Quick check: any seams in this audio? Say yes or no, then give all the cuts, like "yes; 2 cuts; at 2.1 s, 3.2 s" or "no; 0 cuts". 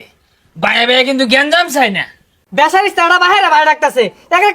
yes; 1 cut; at 2.3 s